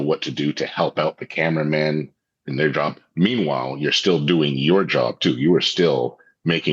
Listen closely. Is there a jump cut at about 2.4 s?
yes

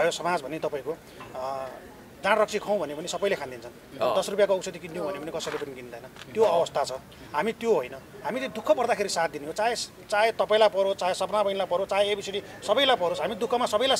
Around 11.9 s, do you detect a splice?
no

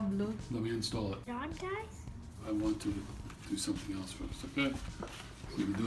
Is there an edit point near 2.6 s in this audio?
no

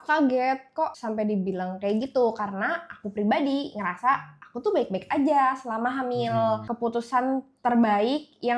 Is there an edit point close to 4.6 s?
no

